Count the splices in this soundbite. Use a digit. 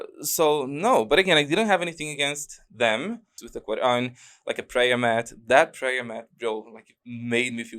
1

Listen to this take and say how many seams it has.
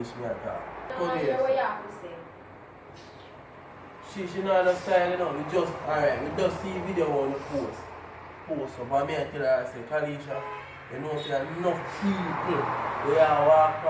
1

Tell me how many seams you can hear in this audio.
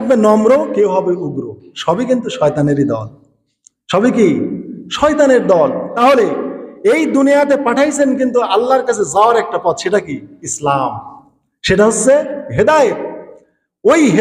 1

